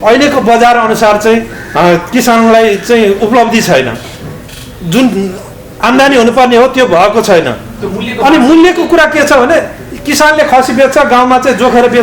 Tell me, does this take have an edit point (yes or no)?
no